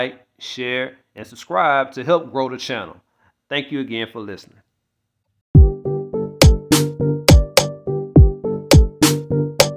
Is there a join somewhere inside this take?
yes; 1 cut; at 5.6 s

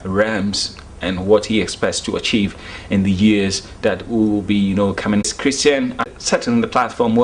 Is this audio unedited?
no; 2 cuts; at 5.3 s, 6.1 s

